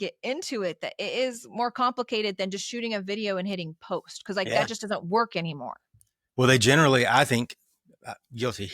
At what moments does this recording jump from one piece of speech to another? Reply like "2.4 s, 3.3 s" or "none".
none